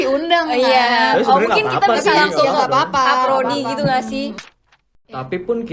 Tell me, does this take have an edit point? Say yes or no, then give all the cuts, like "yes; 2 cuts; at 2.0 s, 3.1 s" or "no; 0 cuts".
yes; 1 cut; at 4.4 s